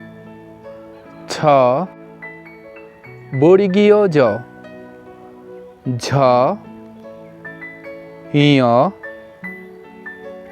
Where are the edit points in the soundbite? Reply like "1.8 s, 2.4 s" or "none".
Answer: 1.9 s, 3.3 s, 4.4 s, 5.8 s, 6.6 s, 8.0 s